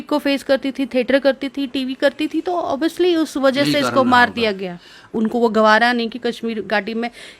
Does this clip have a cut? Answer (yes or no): yes